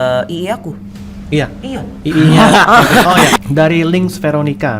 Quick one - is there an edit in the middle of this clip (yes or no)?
yes